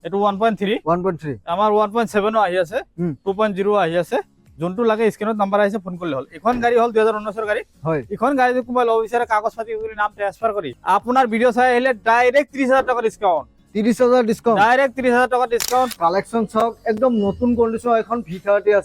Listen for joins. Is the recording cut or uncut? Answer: cut